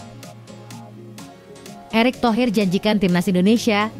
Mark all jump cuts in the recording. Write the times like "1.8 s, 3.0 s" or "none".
1.9 s